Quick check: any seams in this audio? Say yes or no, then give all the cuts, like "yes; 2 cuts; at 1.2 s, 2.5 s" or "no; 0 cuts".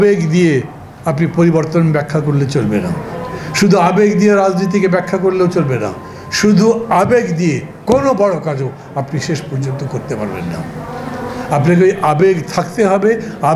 no; 0 cuts